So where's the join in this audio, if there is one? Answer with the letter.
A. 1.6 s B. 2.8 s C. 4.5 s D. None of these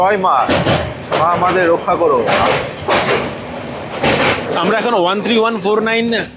C